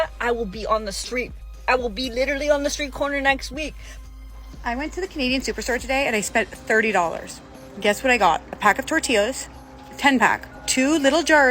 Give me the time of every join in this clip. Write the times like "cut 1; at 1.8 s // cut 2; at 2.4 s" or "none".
cut 1; at 3.9 s // cut 2; at 8.5 s // cut 3; at 10.5 s

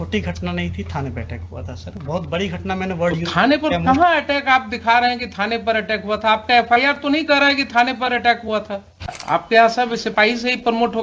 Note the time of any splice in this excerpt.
cut 1; at 9.2 s

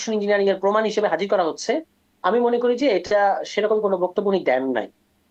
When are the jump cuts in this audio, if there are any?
none

